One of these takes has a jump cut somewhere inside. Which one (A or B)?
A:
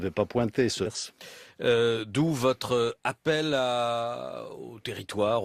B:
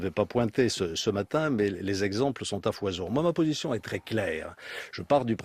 B